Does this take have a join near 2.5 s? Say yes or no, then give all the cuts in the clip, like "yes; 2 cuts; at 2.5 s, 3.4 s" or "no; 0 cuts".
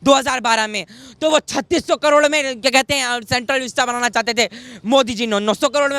no; 0 cuts